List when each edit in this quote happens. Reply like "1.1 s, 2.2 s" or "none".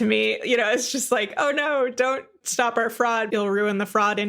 3.3 s